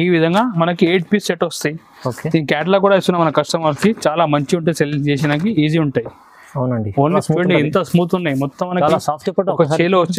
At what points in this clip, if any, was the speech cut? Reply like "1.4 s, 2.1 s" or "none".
7.0 s

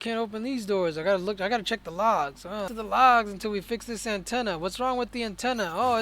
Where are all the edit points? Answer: 2.7 s

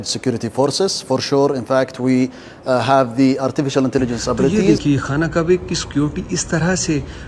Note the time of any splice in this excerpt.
4.5 s

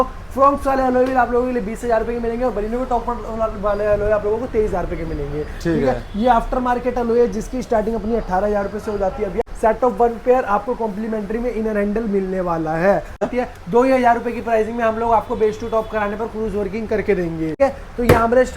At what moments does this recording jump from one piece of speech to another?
9.4 s, 13.3 s, 17.6 s

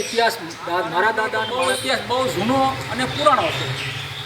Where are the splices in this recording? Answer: 1.4 s

